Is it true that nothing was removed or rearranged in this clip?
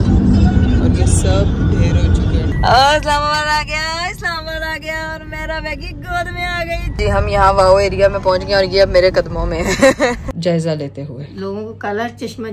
no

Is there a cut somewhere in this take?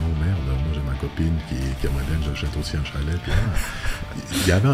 no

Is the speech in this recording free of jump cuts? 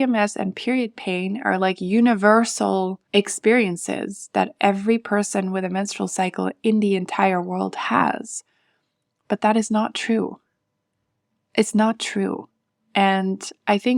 no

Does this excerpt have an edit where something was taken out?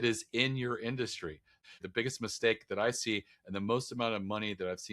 yes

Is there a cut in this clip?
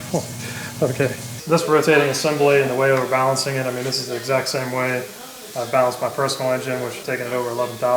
yes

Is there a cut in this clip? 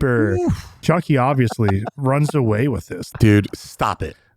yes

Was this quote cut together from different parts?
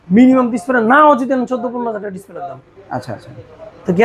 no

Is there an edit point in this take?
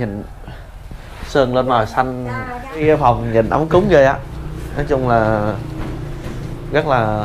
yes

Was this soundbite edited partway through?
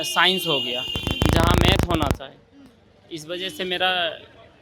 no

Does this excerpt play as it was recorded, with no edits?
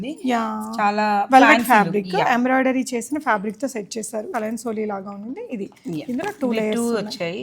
no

